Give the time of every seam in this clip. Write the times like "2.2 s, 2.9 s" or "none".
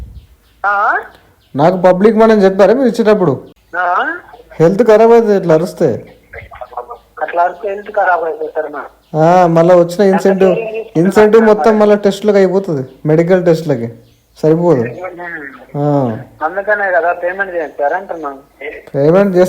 3.5 s